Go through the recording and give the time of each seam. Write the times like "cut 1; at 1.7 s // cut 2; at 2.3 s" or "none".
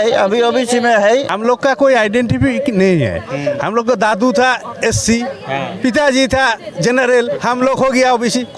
cut 1; at 1.3 s